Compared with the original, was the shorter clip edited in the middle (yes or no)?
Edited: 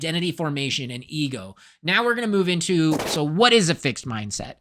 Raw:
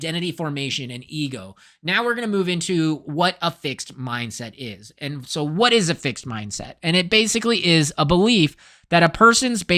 yes